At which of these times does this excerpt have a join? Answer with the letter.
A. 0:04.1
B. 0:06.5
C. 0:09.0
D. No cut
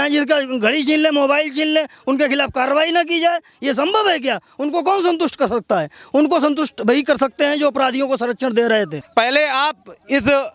C